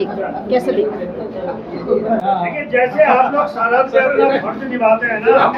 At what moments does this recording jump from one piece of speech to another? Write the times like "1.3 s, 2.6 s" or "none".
2.2 s